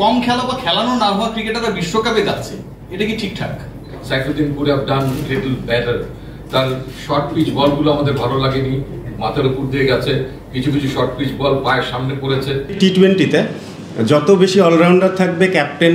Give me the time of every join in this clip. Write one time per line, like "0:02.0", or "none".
0:04.0
0:12.8